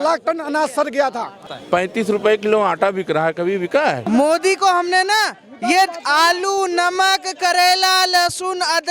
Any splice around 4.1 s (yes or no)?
yes